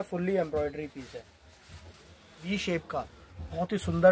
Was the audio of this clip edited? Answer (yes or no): yes